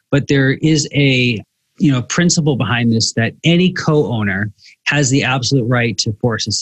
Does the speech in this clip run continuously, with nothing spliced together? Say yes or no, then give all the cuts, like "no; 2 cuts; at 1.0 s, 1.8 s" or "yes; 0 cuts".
yes; 0 cuts